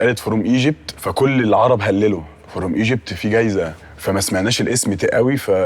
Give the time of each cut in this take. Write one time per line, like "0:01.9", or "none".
0:00.9
0:03.9